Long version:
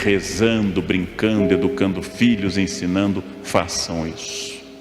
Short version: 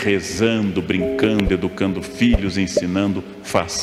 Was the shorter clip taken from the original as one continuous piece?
yes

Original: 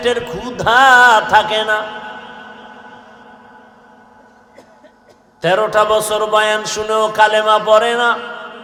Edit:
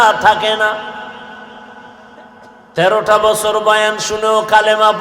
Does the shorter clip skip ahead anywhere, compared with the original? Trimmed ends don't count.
yes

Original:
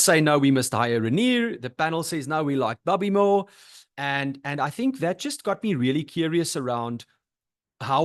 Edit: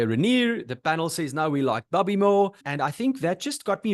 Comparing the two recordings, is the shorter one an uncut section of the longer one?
no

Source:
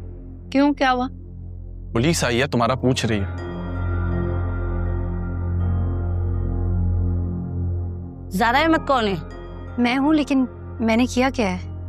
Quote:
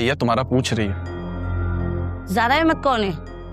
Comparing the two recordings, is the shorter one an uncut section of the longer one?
no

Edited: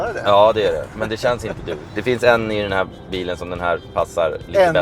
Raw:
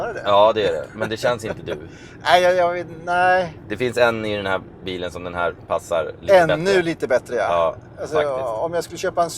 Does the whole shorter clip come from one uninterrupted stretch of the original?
no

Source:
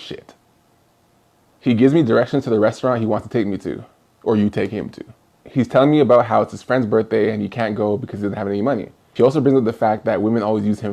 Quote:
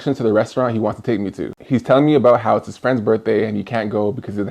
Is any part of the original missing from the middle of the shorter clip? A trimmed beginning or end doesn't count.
yes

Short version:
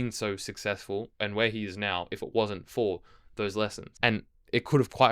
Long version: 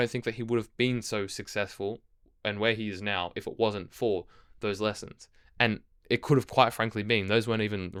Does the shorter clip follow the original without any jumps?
no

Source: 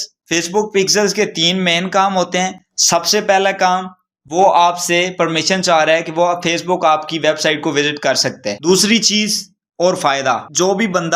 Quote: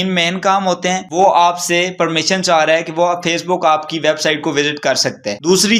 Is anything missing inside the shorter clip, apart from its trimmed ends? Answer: yes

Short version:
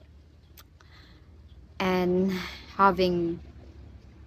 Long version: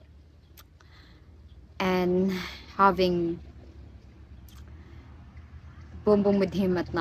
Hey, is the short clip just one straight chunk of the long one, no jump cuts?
yes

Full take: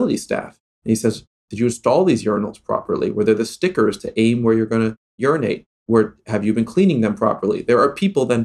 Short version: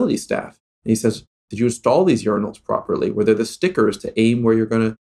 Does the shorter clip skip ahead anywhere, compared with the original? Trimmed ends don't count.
no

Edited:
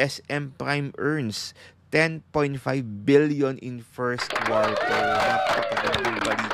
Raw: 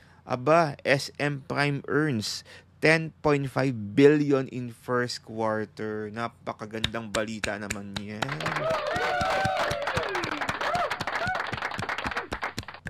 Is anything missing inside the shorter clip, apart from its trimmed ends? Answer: yes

